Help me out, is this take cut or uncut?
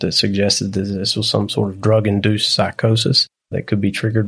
cut